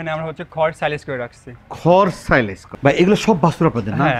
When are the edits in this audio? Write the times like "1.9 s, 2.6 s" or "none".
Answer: 2.6 s